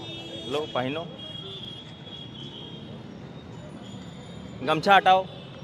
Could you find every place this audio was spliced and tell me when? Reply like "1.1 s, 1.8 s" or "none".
none

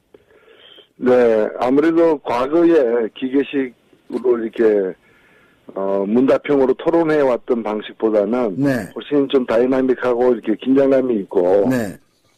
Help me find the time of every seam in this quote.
11.3 s

